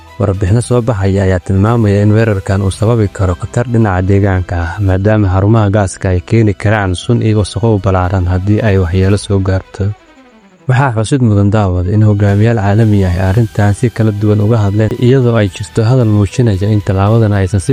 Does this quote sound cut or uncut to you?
uncut